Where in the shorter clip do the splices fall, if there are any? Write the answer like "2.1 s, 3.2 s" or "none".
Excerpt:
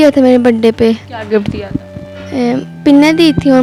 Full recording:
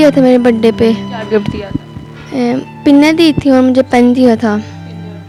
none